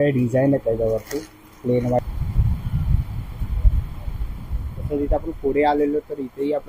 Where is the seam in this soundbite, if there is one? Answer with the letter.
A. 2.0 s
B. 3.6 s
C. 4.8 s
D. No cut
A